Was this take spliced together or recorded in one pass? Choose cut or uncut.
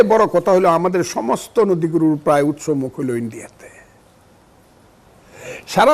uncut